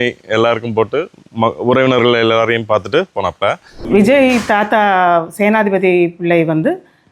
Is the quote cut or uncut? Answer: cut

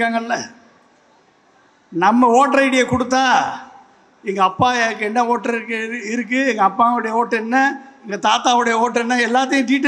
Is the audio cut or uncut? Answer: uncut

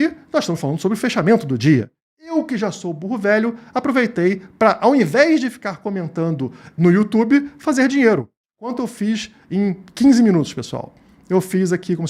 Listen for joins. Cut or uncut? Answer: cut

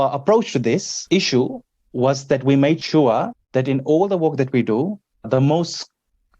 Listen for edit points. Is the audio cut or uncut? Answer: cut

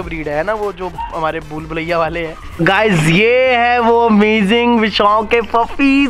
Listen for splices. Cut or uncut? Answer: cut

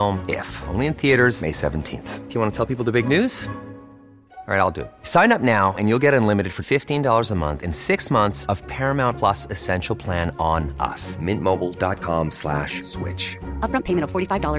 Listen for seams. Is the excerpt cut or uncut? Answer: uncut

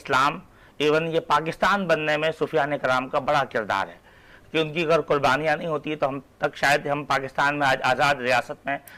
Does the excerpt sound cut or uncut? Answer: uncut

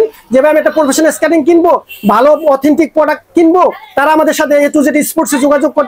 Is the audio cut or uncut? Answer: uncut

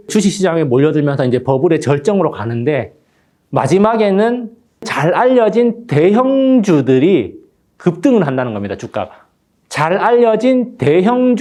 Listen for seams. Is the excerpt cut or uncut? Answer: uncut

